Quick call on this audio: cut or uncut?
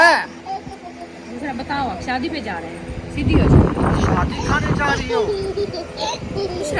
uncut